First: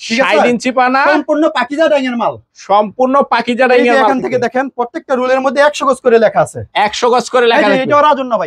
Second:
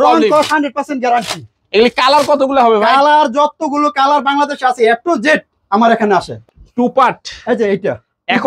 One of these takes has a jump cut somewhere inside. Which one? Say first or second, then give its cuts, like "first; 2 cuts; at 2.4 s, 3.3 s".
second; 1 cut; at 6.5 s